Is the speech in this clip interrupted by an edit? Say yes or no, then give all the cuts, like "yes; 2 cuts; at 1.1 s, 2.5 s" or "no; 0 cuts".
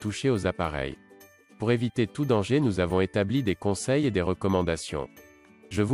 no; 0 cuts